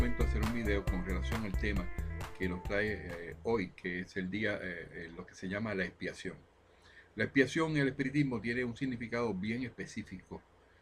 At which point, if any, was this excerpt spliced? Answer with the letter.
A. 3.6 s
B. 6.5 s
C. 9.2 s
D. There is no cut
D